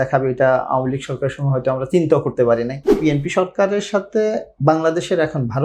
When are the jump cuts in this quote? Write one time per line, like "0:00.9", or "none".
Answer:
0:03.0